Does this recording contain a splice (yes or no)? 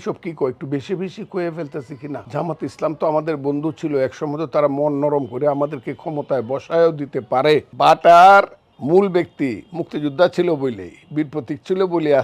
yes